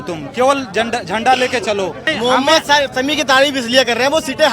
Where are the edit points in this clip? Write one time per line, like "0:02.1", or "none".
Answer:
0:02.1

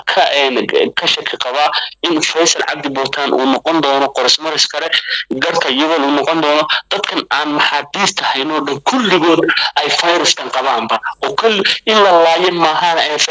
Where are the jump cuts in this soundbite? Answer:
none

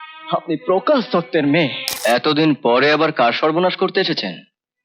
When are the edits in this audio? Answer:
0:01.9

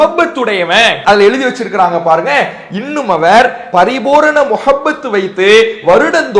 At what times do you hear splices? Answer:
0:01.0

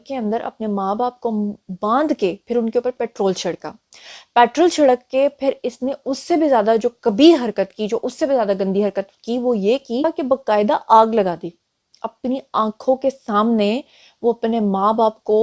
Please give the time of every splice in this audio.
0:10.1

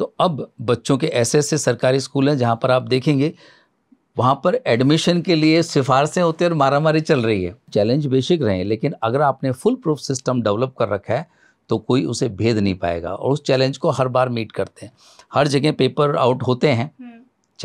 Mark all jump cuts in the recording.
0:07.7

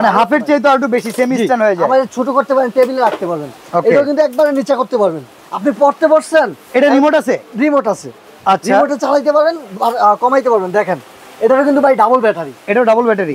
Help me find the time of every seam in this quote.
none

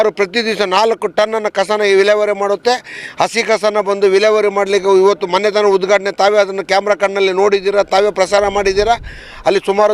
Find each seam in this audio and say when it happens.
none

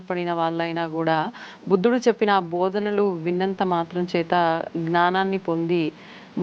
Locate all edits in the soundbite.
none

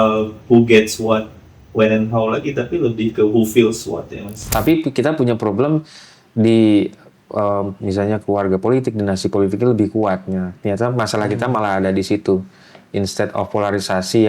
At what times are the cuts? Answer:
0:04.4

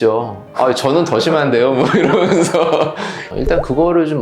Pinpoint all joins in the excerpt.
0:03.2

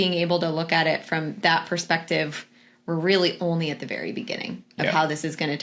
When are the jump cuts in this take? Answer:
none

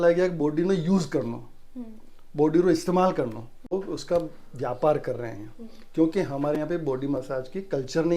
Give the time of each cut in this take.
0:03.8

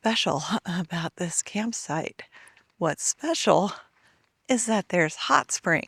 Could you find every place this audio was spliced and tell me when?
none

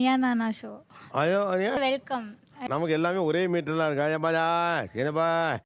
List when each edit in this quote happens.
none

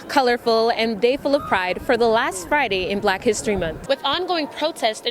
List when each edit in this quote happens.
0:03.8

